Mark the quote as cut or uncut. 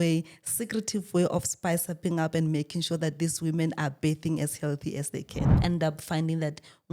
cut